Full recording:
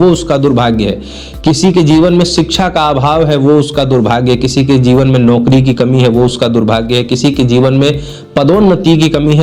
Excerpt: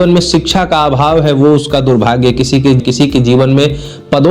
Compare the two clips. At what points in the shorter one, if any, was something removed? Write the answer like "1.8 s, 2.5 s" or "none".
2.8 s

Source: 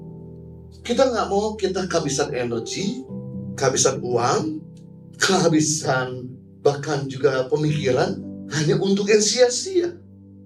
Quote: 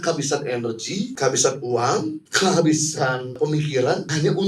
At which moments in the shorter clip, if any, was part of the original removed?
1.1 s, 2.2 s, 3.7 s

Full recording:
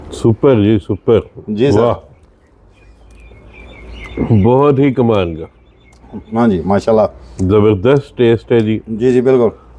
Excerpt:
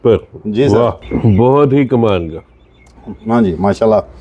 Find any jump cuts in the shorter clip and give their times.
1.0 s

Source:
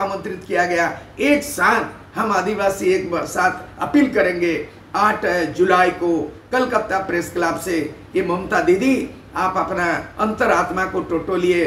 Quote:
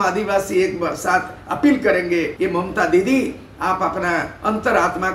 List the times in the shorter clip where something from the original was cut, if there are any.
2.3 s

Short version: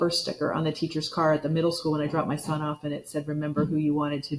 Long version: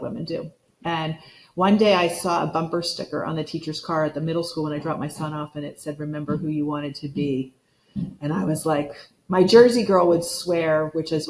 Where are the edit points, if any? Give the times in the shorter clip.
none

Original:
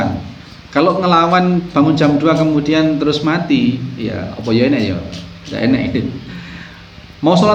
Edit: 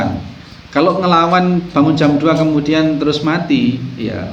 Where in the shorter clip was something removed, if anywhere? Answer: none

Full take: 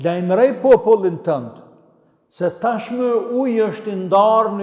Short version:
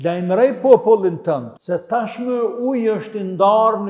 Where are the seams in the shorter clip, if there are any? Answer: 1.5 s

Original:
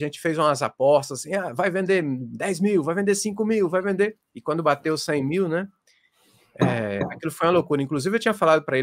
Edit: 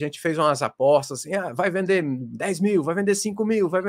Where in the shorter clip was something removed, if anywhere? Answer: none

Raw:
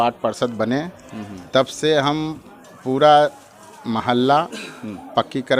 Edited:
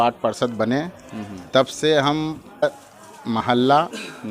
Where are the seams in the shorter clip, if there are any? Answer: 2.6 s

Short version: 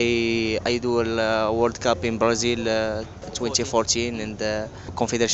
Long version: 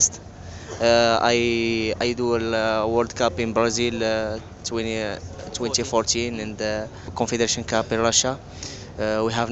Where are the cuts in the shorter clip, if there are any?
3.2 s

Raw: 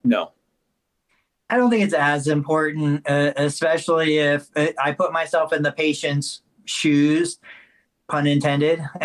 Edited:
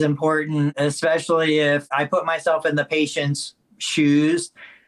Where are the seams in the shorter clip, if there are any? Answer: 0.7 s, 1.9 s

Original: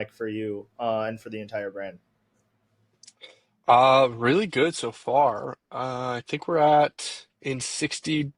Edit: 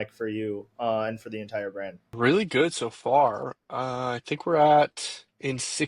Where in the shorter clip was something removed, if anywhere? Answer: 2.1 s

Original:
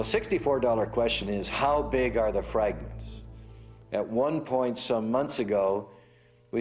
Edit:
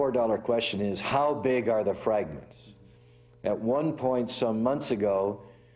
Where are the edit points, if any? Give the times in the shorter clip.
none

